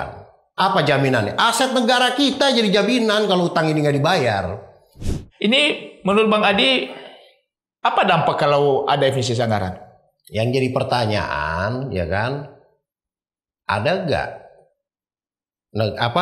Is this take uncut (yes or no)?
no